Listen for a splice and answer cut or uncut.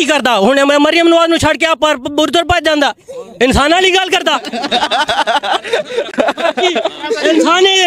uncut